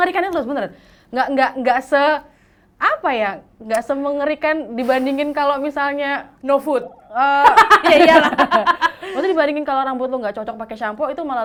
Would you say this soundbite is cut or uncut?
uncut